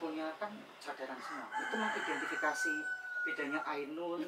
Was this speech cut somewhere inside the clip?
no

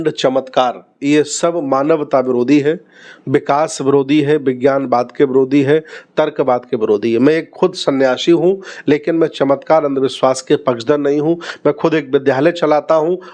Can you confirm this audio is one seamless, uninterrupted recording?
yes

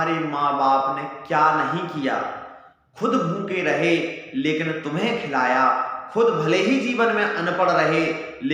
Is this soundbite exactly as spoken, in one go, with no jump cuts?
yes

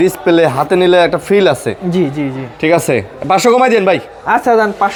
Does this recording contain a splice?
no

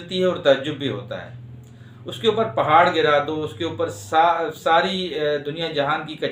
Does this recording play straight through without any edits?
yes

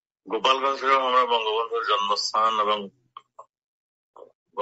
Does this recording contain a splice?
yes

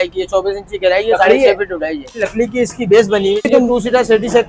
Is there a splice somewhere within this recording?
yes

